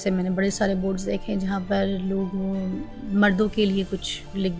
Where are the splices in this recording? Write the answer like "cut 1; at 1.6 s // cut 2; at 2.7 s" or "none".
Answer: none